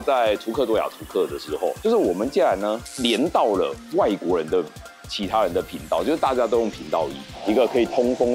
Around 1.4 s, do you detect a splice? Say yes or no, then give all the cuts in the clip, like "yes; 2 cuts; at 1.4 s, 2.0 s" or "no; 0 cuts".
no; 1 cut; at 7.2 s